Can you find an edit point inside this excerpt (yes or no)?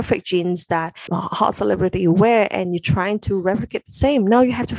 yes